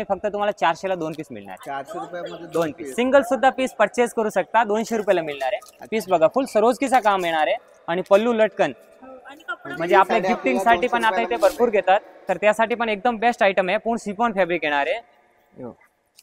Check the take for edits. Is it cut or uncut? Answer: uncut